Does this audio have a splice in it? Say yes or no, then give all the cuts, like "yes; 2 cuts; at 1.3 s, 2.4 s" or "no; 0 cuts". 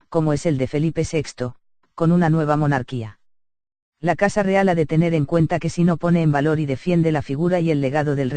no; 0 cuts